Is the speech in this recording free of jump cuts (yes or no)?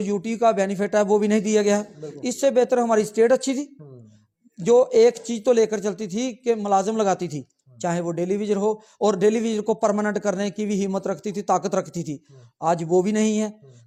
yes